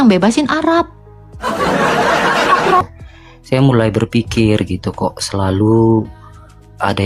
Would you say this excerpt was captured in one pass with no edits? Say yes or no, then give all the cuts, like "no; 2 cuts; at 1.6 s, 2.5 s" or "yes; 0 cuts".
no; 1 cut; at 2.8 s